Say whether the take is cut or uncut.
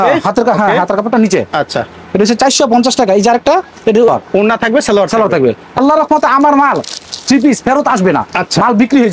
uncut